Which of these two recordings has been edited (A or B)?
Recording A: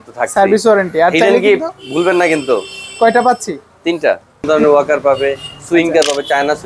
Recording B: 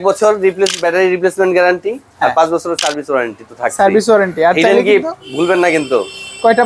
A